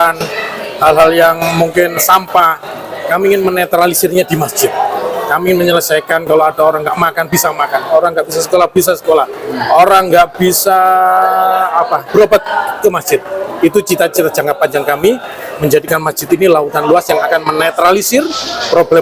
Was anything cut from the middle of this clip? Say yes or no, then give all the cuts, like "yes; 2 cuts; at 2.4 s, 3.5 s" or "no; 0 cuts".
no; 0 cuts